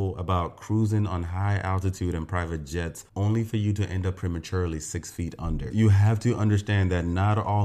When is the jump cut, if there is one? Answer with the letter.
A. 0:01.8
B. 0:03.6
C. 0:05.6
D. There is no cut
C